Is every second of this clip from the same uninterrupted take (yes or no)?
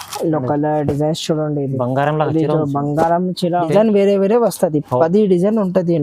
no